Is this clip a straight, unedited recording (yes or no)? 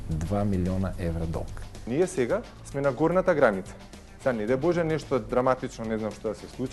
no